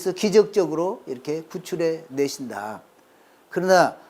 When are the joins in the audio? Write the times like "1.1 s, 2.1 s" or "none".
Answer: none